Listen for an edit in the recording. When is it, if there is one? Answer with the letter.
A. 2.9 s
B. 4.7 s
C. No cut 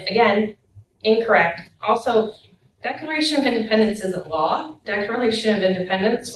C